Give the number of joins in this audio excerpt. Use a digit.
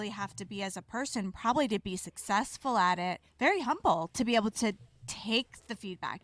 1